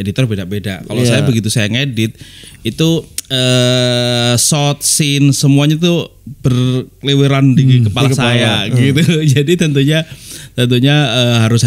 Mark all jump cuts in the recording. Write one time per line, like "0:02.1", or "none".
none